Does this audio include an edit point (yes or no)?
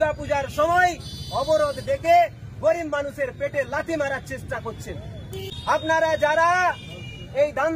yes